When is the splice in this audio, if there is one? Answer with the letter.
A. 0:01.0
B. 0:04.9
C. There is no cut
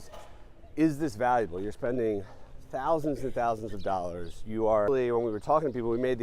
B